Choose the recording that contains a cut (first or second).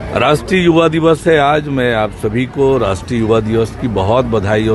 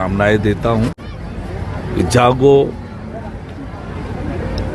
second